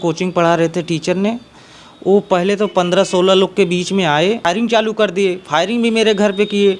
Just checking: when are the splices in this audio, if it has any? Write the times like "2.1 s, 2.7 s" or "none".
4.4 s